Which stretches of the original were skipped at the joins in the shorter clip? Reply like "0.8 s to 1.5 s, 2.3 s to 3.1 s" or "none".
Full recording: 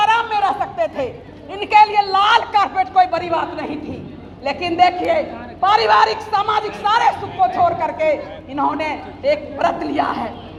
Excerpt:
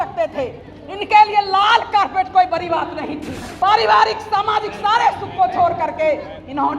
4.0 s to 5.4 s